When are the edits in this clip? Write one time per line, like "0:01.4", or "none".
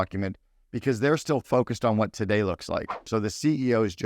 0:03.0